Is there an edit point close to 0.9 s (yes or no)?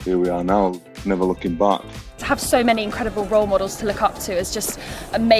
yes